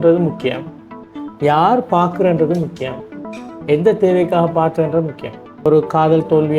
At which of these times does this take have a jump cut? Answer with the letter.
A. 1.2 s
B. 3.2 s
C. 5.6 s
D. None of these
C